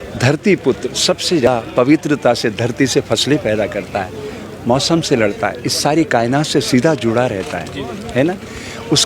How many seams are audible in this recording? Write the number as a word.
one